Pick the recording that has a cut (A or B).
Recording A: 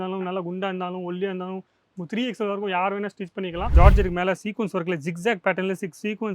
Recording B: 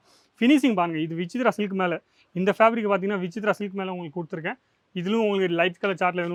A